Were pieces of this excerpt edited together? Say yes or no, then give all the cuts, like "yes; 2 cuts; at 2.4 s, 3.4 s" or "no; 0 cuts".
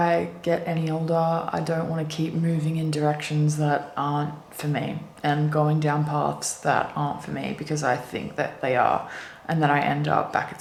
no; 0 cuts